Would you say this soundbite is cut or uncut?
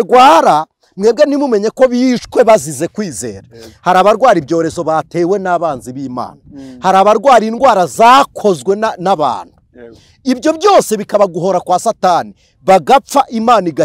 uncut